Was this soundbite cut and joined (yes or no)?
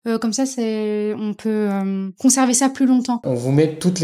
yes